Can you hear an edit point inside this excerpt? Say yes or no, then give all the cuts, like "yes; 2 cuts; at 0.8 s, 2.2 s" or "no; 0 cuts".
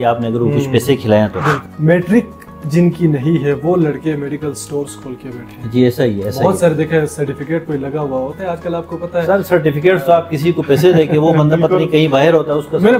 yes; 1 cut; at 1.6 s